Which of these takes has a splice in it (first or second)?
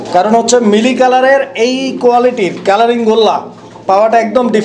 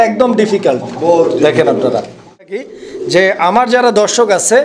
second